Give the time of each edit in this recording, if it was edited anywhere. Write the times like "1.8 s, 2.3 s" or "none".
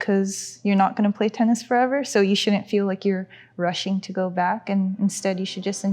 none